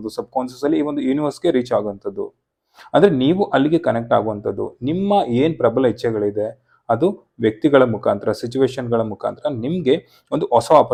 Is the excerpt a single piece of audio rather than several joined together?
yes; 0 cuts

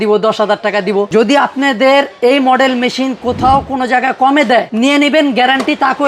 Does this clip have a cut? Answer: yes; 2 cuts; at 1.1 s, 4.7 s

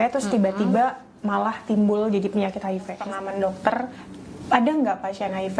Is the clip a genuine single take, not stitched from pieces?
no; 1 cut; at 2.9 s

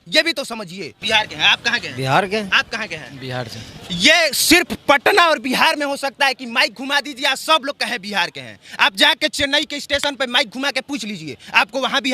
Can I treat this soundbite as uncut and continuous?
no; 1 cut; at 0.9 s

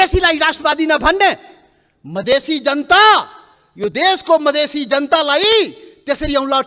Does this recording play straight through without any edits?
yes; 0 cuts

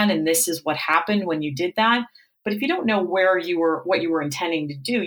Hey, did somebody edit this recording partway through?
no; 0 cuts

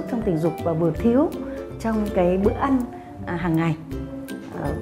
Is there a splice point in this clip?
no; 0 cuts

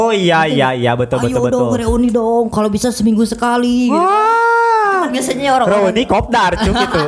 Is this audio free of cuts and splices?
yes; 0 cuts

